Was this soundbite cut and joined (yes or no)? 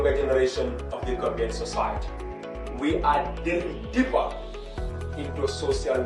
no